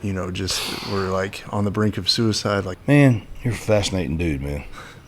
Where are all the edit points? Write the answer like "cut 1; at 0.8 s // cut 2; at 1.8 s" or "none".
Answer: cut 1; at 2.7 s